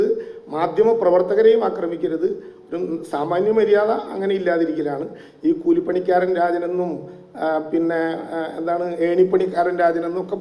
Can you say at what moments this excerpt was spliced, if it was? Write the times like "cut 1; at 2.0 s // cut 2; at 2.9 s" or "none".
none